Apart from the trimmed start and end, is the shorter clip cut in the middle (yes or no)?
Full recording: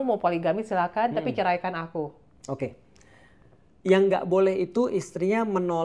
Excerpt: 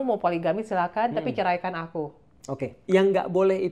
yes